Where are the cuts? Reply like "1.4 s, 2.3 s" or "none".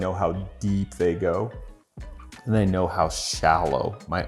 none